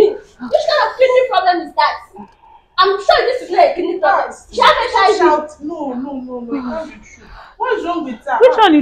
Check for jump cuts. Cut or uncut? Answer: uncut